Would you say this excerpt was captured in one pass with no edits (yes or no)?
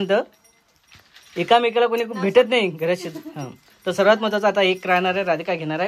yes